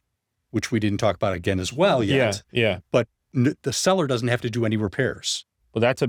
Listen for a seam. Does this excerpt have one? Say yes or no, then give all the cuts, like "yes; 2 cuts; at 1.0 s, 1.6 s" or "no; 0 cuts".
no; 0 cuts